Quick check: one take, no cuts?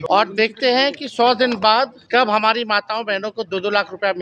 no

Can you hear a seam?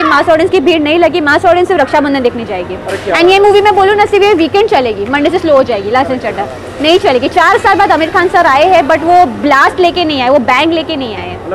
no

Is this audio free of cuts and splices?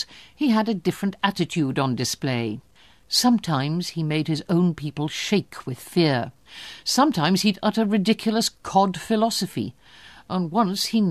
no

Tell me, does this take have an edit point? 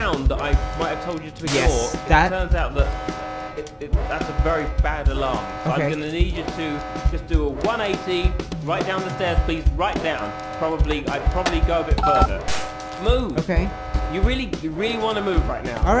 no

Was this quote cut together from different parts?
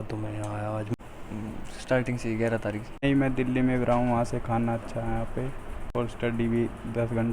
yes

